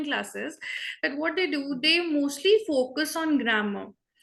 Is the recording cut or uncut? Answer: uncut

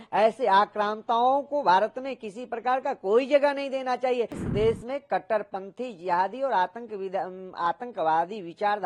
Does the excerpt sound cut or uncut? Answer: cut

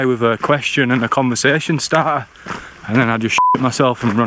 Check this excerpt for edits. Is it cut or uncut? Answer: uncut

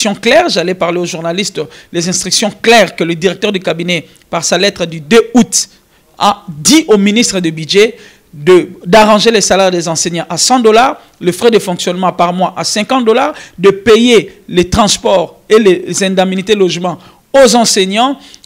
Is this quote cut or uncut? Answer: uncut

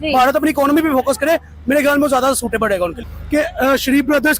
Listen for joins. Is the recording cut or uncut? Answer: cut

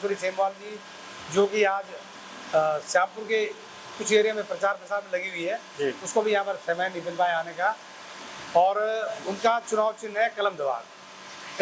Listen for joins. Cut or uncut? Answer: uncut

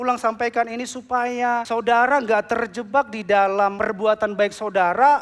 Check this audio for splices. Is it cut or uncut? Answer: cut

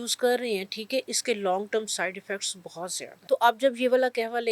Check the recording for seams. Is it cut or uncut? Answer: cut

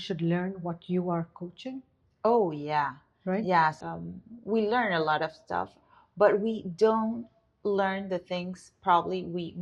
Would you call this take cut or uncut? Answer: cut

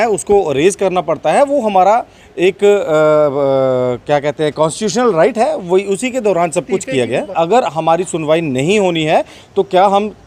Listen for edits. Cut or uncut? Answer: uncut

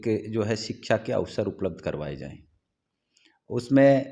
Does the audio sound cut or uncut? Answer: uncut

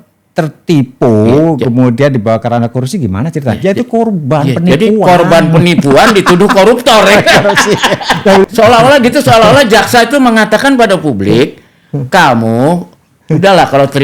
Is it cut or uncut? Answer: cut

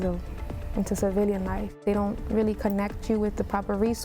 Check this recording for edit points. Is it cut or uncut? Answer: cut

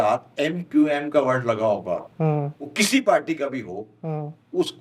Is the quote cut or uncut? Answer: uncut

